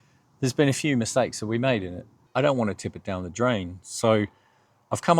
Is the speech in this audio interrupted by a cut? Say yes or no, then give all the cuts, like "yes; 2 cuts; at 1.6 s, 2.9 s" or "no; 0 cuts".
yes; 1 cut; at 2.2 s